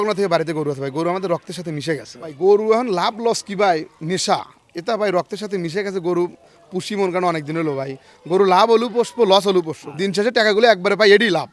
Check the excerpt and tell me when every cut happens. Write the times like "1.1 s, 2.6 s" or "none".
2.3 s, 9.8 s